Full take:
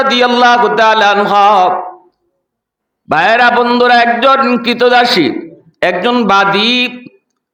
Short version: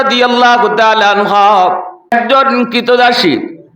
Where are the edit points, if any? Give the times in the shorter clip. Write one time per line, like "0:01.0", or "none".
0:02.1